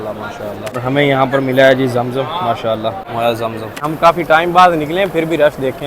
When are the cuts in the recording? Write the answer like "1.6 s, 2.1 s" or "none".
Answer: 0.8 s, 3.0 s, 3.8 s